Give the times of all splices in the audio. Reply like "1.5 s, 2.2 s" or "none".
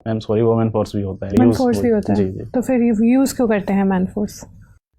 1.3 s